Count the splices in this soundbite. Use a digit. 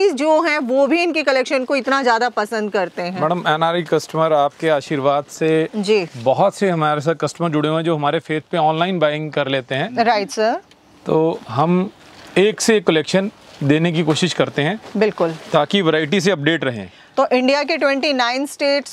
0